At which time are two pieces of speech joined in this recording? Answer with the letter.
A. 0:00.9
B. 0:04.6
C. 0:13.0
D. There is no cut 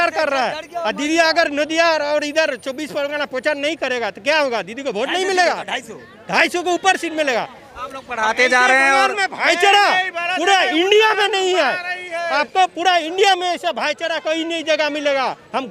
D